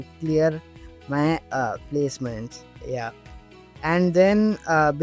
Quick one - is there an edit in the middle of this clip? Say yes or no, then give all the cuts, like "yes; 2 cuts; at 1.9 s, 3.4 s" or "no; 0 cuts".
no; 0 cuts